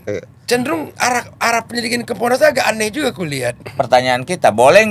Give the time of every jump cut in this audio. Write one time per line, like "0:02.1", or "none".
0:03.6